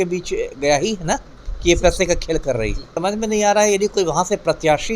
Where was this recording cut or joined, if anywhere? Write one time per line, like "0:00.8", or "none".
0:02.9